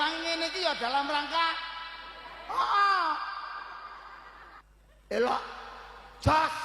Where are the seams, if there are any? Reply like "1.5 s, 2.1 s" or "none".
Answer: 4.6 s